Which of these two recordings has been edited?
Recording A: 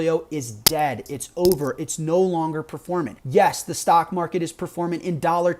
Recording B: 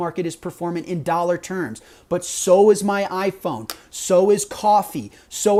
A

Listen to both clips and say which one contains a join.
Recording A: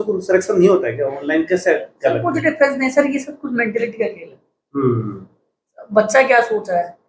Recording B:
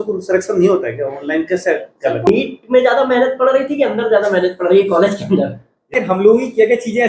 B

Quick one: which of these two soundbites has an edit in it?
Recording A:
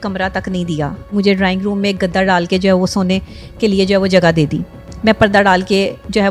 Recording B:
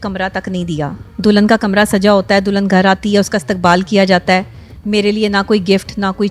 A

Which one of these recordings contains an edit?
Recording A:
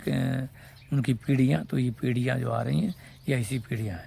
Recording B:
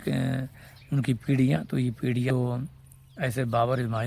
B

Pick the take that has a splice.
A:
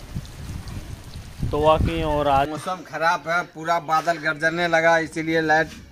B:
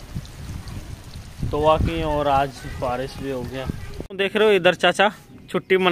A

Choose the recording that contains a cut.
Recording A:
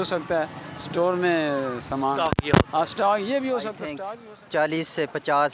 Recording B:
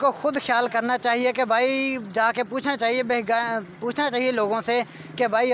A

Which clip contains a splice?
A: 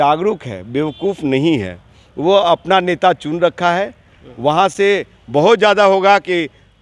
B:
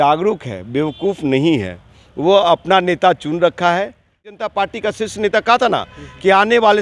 B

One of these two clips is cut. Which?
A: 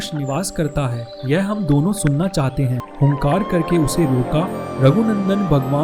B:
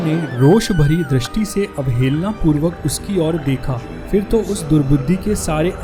A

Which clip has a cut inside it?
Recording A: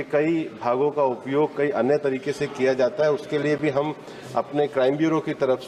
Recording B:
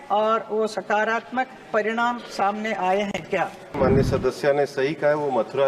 B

